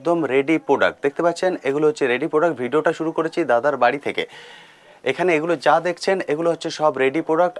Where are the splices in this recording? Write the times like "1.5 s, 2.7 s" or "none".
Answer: none